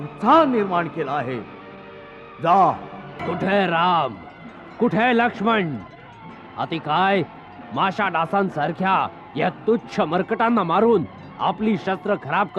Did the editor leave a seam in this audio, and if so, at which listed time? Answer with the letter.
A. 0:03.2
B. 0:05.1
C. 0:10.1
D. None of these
A